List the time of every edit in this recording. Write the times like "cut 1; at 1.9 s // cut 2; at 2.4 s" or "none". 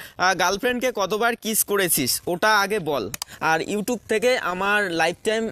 cut 1; at 3.3 s